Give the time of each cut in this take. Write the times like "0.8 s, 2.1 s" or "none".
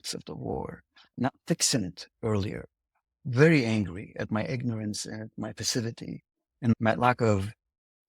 1.1 s, 6.7 s